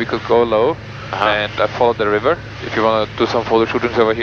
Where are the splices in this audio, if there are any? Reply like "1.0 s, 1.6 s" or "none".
2.6 s